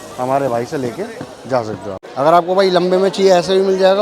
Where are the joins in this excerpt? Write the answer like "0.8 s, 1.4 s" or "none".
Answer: 2.0 s